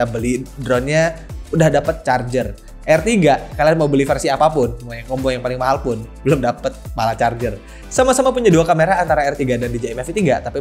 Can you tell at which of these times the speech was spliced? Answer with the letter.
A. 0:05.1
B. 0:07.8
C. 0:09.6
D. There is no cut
B